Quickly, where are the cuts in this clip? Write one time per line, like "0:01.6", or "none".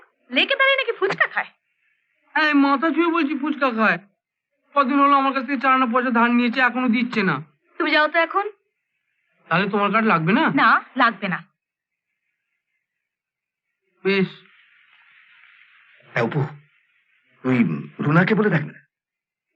none

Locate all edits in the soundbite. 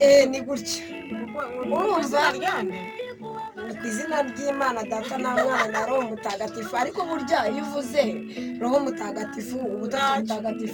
none

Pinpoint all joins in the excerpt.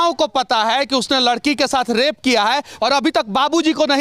0:02.7

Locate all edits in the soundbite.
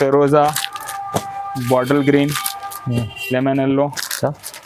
none

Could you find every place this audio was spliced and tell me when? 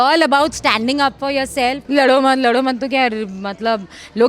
0:01.8

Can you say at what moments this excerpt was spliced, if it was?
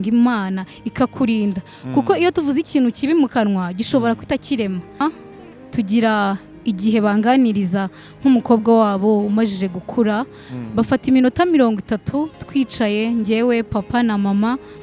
0:05.0

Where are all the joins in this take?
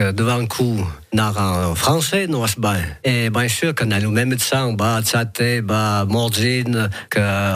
none

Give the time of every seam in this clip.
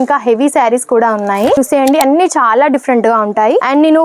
0:01.6

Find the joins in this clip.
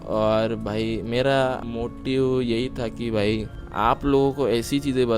0:01.7
0:03.6

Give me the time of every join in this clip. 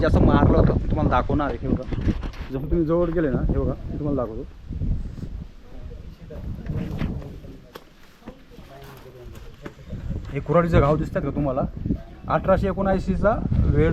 none

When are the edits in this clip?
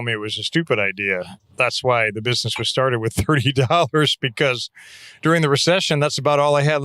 0:01.4

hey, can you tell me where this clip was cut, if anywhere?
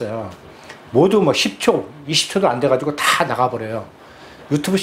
none

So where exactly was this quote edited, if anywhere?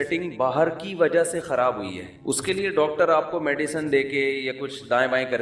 none

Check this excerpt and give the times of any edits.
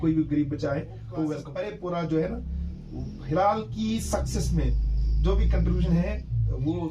0:01.5

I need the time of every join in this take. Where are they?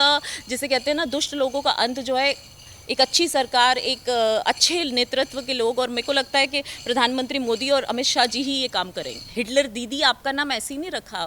0:09.2

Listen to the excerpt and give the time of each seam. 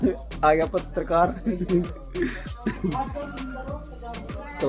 none

